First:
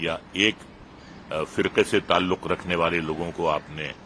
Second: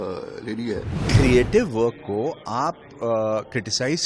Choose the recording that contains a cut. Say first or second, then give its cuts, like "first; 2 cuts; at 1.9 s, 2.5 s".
second; 1 cut; at 1.0 s